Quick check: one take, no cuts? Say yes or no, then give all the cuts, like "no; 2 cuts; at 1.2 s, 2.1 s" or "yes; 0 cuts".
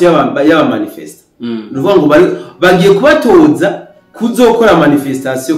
yes; 0 cuts